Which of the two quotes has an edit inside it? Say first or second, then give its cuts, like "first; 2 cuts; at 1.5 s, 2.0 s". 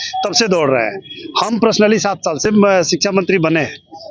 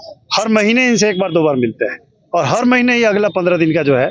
first; 1 cut; at 2.4 s